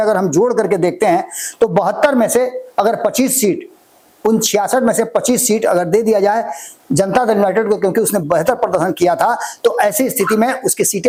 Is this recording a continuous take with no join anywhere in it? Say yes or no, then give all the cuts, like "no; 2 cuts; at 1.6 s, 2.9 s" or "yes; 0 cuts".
yes; 0 cuts